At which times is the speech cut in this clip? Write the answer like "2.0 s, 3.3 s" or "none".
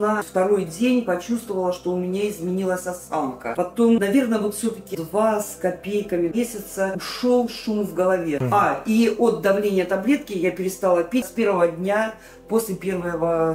3.5 s, 8.4 s, 11.3 s